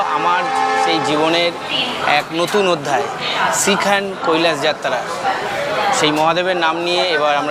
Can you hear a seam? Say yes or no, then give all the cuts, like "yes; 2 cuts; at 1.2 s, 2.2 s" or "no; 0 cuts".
no; 0 cuts